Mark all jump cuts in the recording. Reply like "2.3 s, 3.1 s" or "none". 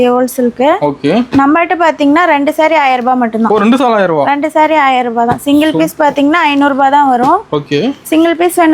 none